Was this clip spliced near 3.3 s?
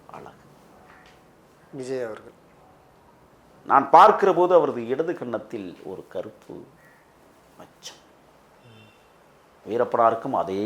yes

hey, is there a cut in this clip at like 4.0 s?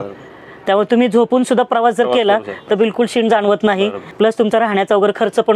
yes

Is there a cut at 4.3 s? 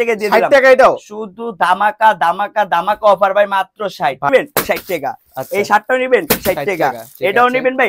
yes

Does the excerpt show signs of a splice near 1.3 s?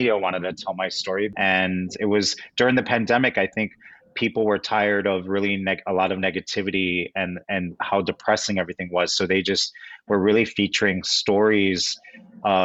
yes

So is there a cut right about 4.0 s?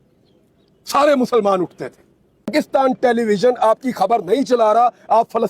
no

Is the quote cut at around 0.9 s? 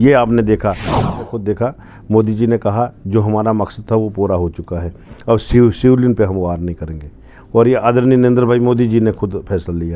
yes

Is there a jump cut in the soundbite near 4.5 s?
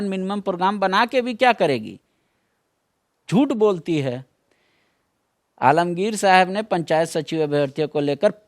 no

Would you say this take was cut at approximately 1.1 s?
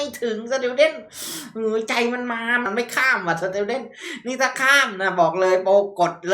no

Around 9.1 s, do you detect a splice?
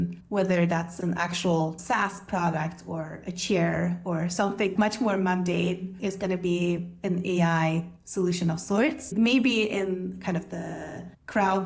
yes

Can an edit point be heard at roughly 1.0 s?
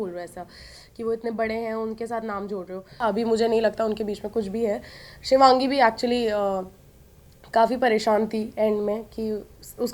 no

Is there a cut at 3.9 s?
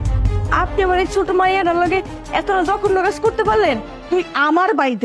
yes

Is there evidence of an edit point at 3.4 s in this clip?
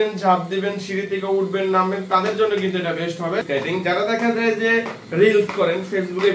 yes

